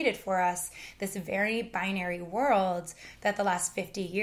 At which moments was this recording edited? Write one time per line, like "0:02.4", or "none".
none